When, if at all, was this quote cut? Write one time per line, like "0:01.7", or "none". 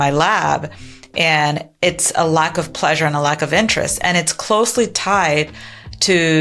none